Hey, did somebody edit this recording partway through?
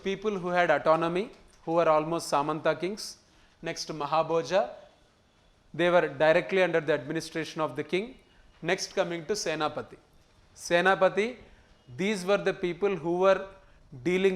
no; 0 cuts

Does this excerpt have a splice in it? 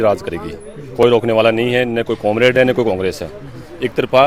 no; 0 cuts

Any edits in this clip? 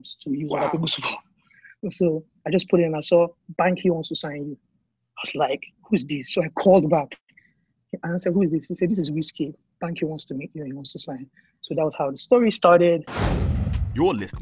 yes; 1 cut; at 13.4 s

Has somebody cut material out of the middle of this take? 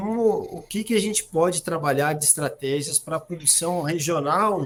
no; 0 cuts

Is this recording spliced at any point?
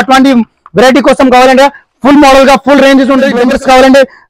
yes; 1 cut; at 3.4 s

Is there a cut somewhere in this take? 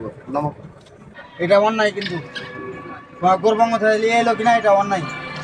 yes; 1 cut; at 1.2 s

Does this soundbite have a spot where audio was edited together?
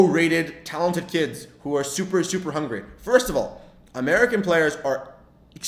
no; 0 cuts

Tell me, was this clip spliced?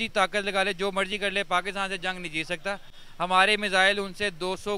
no; 0 cuts

